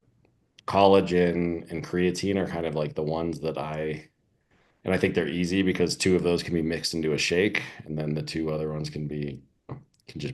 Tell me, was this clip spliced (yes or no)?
no